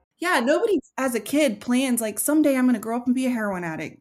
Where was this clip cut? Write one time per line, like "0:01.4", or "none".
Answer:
0:00.9